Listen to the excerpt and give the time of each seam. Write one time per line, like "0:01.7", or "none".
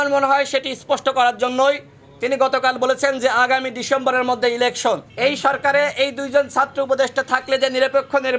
0:05.1